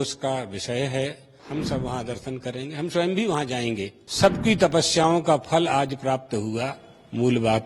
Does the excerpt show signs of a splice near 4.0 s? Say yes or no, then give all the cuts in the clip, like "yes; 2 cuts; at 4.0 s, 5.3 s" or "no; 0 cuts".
yes; 2 cuts; at 1.3 s, 4.0 s